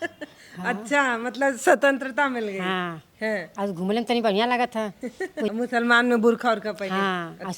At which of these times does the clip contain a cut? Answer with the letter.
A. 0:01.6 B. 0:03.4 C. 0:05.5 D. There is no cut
C